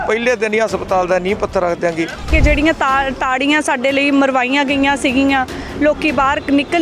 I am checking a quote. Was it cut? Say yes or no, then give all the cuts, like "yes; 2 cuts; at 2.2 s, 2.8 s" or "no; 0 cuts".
yes; 1 cut; at 2.3 s